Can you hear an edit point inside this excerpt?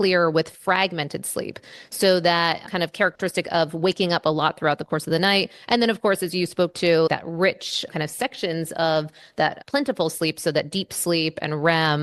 no; 0 cuts

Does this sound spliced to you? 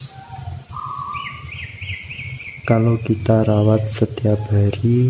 no; 0 cuts

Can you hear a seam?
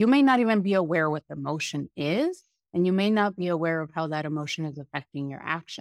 no; 0 cuts

